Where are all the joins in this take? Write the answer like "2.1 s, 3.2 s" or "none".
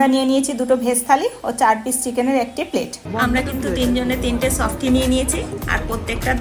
3.0 s